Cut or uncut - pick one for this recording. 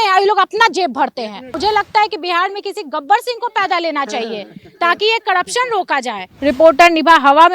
cut